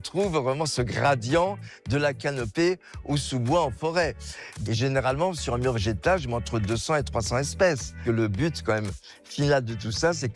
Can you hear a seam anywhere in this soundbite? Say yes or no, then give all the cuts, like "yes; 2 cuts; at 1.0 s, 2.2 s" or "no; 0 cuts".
yes; 1 cut; at 7.9 s